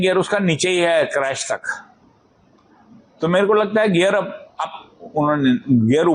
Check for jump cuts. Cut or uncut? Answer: uncut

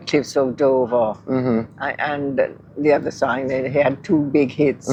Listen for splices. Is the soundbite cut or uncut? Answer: uncut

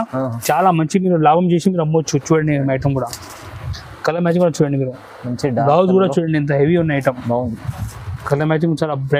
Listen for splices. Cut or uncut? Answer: uncut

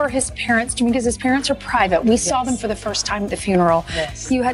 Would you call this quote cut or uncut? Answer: uncut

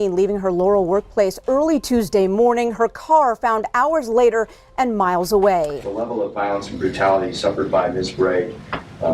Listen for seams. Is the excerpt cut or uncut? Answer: cut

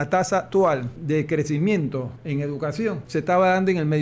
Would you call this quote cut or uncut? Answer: cut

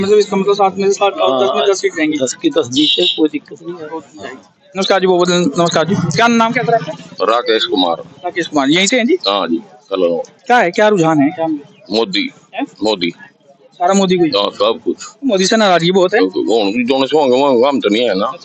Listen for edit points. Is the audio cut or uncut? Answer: uncut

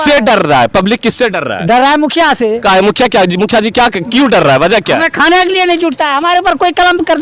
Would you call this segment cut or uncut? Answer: uncut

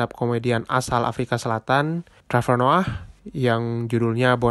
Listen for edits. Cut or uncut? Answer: cut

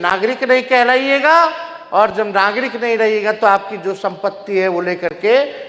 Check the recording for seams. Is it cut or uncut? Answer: uncut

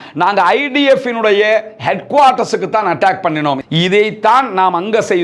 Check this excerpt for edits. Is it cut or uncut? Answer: cut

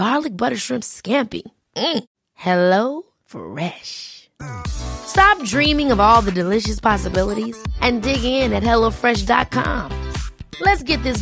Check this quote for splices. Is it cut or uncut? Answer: uncut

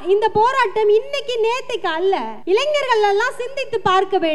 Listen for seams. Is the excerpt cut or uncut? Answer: cut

